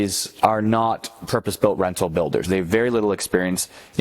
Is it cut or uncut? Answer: cut